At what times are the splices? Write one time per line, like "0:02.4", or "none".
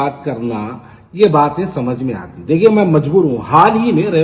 none